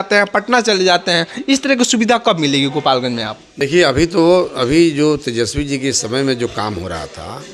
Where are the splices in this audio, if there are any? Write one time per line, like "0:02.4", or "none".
none